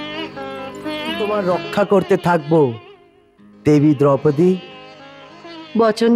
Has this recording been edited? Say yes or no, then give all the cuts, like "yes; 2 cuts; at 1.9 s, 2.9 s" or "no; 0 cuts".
yes; 1 cut; at 1.3 s